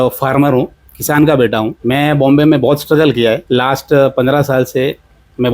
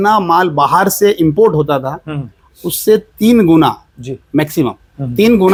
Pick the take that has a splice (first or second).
first